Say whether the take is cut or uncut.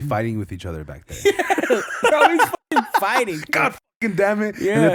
uncut